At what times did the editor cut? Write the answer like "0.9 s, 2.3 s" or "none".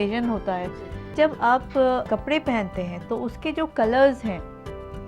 1.0 s, 2.0 s